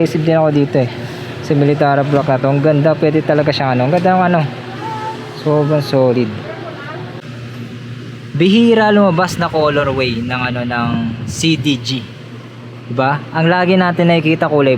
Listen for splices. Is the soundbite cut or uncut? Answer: cut